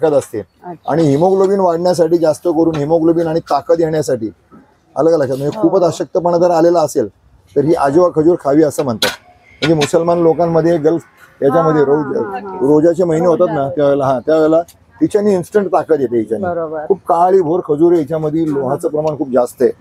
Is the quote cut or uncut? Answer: uncut